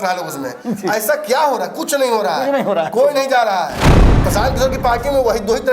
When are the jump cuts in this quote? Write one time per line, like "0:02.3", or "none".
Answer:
0:03.9

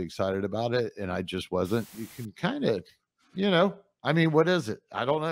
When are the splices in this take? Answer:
0:01.9

